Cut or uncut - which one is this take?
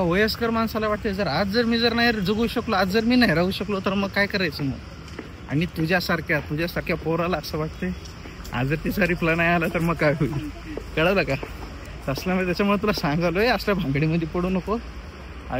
uncut